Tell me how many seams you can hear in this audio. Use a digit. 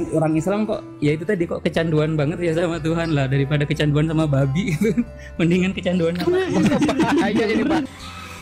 0